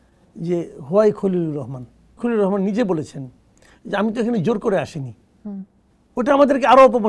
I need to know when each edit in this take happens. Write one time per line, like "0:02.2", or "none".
0:02.1

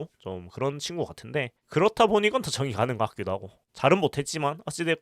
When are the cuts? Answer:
0:03.7

